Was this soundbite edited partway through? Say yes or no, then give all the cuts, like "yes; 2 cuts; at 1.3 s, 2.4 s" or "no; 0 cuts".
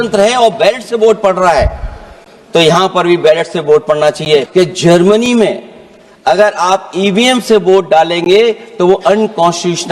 yes; 1 cut; at 4.5 s